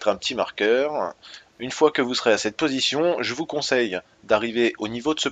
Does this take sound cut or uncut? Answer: cut